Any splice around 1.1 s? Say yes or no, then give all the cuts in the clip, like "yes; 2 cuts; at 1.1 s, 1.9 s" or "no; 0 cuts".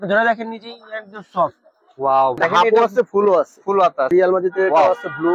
no; 2 cuts; at 2.4 s, 4.1 s